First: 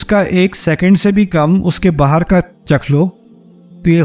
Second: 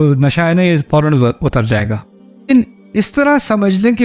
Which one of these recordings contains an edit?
second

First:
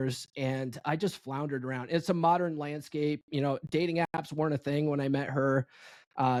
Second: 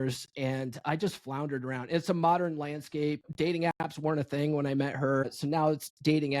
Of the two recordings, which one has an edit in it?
second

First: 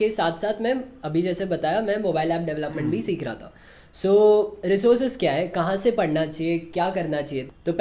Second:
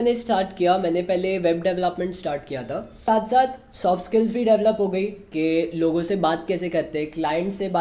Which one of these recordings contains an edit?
second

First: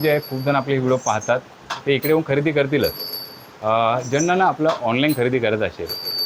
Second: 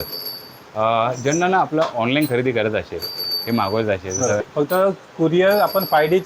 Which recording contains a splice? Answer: second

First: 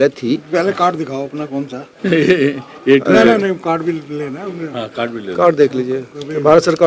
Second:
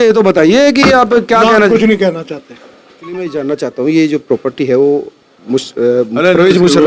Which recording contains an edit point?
second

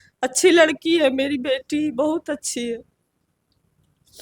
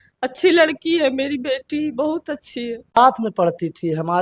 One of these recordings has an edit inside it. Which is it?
second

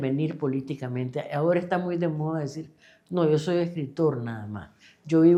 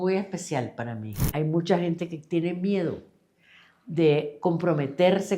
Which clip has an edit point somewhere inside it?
second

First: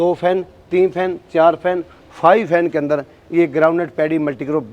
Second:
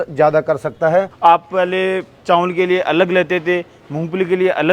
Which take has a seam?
second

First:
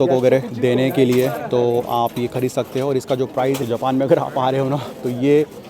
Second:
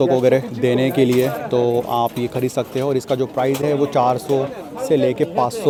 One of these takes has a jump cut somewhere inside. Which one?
first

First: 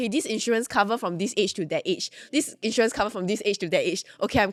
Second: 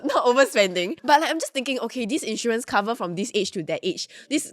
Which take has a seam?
second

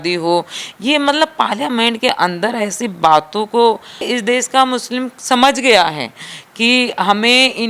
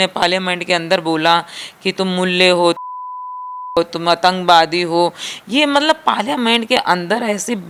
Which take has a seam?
first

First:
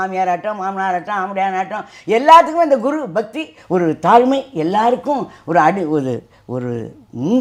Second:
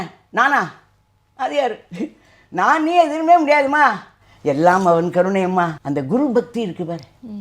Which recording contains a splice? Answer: second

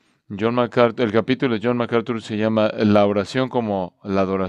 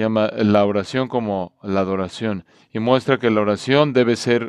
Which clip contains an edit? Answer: first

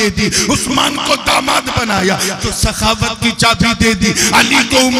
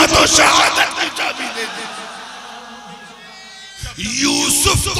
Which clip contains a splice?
second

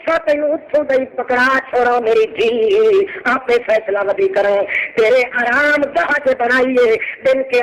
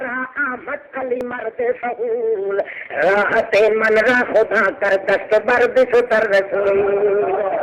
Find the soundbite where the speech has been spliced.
second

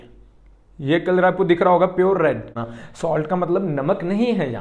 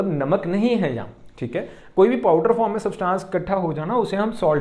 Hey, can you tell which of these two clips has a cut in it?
first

